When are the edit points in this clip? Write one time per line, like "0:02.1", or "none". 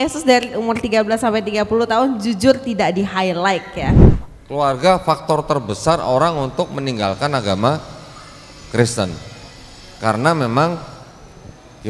0:04.1